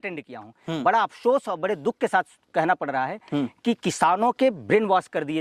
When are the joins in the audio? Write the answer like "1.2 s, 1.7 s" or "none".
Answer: none

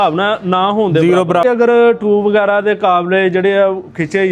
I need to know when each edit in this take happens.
1.4 s

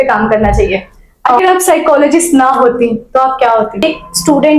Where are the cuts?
1.4 s, 3.8 s

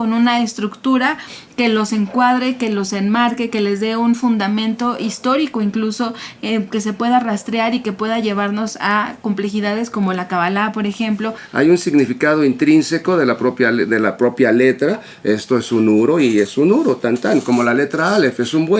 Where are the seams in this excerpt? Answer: 11.4 s

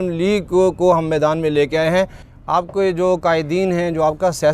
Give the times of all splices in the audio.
2.2 s

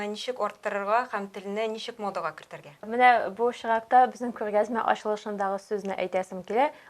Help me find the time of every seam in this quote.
2.9 s

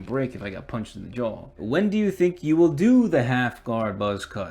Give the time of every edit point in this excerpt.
1.5 s

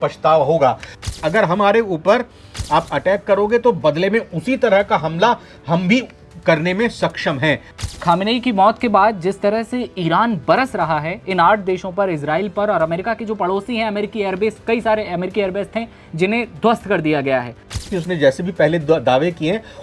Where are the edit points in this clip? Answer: 1.0 s, 7.9 s, 17.8 s

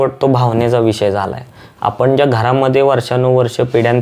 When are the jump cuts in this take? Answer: none

